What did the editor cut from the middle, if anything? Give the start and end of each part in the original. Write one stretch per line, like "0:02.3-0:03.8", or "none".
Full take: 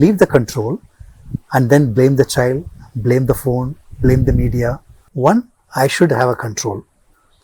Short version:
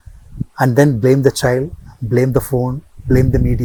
none